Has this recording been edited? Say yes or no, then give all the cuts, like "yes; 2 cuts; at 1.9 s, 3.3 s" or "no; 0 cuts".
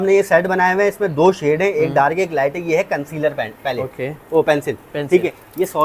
no; 0 cuts